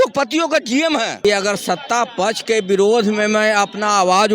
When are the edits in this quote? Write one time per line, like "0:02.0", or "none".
0:01.2